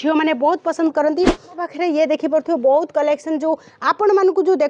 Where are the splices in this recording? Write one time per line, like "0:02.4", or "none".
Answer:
0:01.6